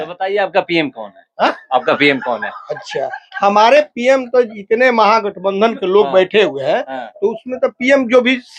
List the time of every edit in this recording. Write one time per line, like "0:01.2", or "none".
none

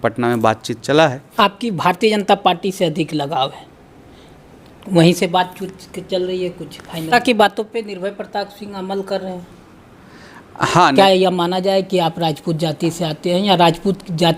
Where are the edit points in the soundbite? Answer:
0:01.2
0:07.1
0:10.9

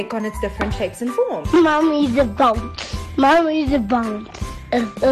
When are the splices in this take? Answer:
0:01.4

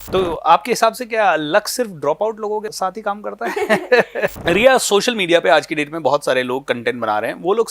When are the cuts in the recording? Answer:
0:02.7
0:04.4

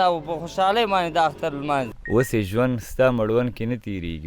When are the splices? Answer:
0:01.9

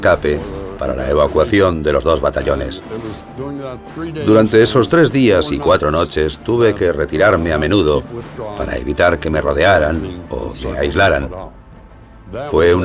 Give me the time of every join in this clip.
none

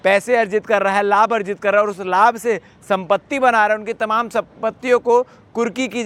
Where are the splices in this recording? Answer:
none

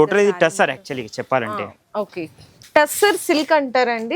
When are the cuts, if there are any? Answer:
0:02.5

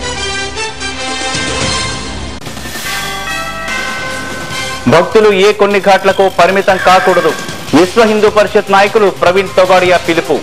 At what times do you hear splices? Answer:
0:04.7

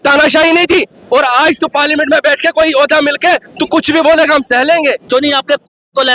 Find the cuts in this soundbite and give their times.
0:05.1

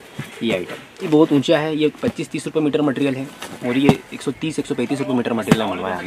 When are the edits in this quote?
0:01.0

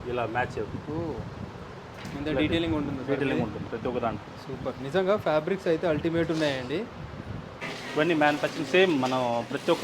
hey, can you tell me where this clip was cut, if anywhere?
0:07.7

